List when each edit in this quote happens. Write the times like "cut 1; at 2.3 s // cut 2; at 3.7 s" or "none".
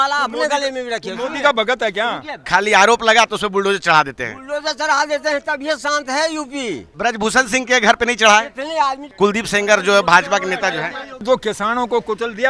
cut 1; at 2.4 s // cut 2; at 6.9 s // cut 3; at 9.1 s // cut 4; at 11.1 s